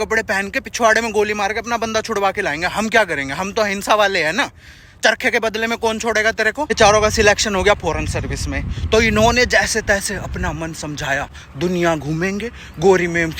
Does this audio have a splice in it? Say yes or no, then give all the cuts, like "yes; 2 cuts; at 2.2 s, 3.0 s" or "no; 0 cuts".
yes; 2 cuts; at 6.7 s, 11.4 s